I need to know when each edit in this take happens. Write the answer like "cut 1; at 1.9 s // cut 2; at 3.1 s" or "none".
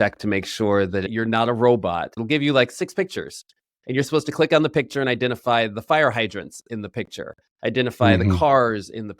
cut 1; at 1.1 s // cut 2; at 2.1 s // cut 3; at 3.7 s